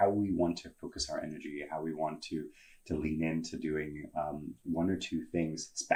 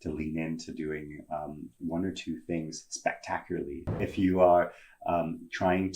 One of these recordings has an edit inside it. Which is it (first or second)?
second